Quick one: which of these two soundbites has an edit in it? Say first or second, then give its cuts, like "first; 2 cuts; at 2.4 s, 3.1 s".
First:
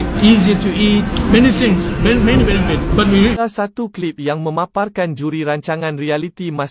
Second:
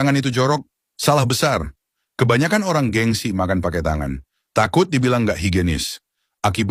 first; 1 cut; at 3.3 s